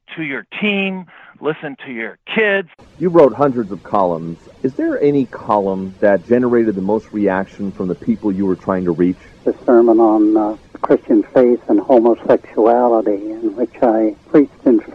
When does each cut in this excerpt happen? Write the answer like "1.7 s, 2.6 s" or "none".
2.8 s